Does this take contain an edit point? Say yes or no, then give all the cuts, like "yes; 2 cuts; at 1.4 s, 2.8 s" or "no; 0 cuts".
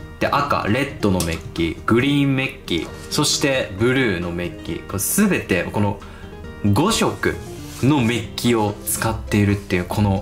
no; 0 cuts